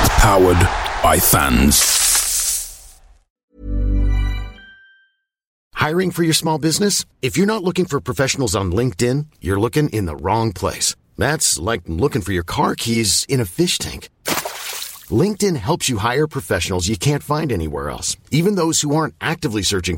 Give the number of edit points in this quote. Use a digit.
1